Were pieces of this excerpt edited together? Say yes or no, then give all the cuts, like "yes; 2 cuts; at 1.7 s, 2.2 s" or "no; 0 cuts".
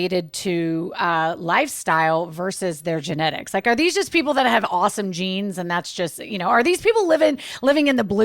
no; 0 cuts